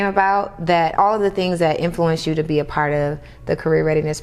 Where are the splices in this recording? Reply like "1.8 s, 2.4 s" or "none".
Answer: 0.9 s